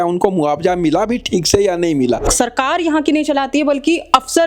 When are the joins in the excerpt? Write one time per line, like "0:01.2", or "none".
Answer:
0:02.3